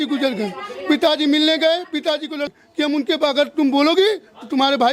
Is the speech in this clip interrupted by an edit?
yes; 1 cut; at 2.5 s

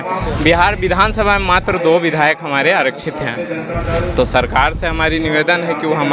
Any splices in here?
no; 0 cuts

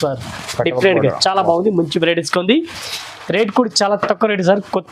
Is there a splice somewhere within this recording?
no; 0 cuts

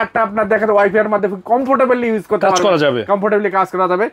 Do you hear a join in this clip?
no; 0 cuts

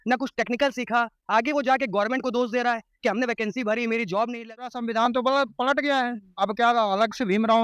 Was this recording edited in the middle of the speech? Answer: yes; 1 cut; at 4.7 s

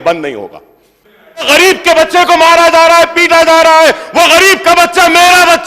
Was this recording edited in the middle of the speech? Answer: yes; 1 cut; at 1.5 s

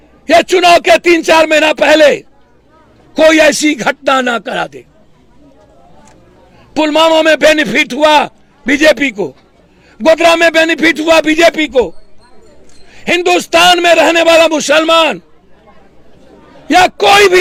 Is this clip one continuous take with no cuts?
yes; 0 cuts

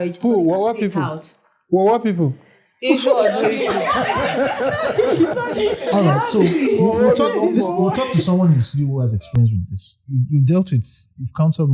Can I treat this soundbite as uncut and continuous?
yes; 0 cuts

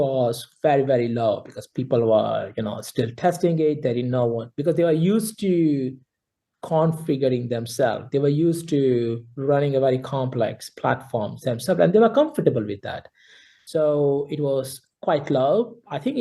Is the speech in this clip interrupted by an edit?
no; 0 cuts

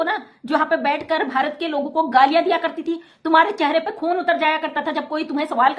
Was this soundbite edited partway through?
no; 0 cuts

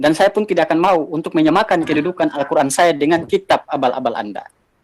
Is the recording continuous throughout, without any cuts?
yes; 0 cuts

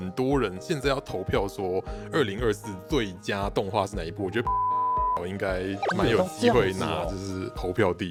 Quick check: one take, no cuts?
yes; 0 cuts

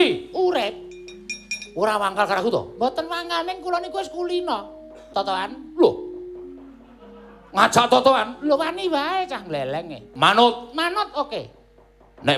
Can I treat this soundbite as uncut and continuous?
no; 2 cuts; at 5.0 s, 10.0 s

